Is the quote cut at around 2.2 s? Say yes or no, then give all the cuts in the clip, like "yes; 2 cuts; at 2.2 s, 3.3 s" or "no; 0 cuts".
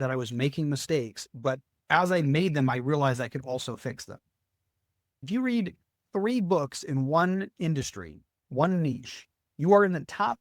no; 1 cut; at 5.2 s